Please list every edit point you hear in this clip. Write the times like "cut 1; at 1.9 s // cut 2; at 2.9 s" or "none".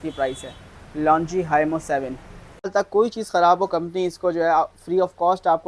cut 1; at 2.7 s

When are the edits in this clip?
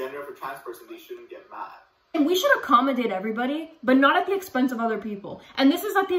cut 1; at 2.1 s

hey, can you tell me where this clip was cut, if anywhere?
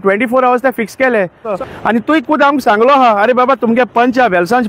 cut 1; at 1.5 s

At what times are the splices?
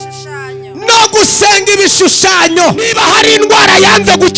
cut 1; at 2.9 s

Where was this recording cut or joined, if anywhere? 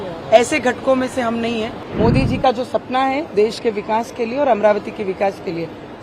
cut 1; at 1.8 s

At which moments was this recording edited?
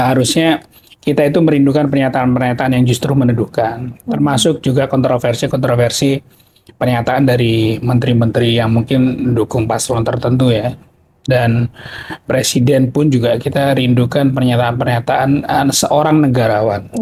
none

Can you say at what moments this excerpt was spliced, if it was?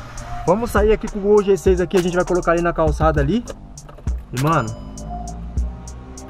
none

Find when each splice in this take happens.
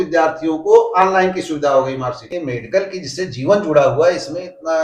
cut 1; at 2.2 s

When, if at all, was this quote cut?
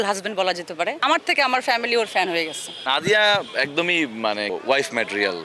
cut 1; at 1.0 s // cut 2; at 2.8 s

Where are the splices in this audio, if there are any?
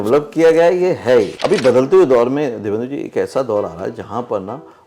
cut 1; at 1.4 s

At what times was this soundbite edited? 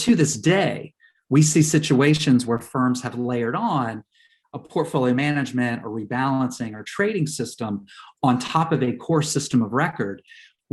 none

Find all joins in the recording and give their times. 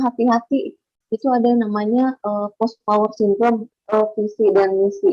cut 1; at 3.7 s

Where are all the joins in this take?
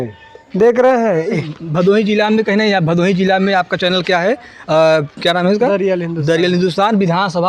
cut 1; at 1.3 s

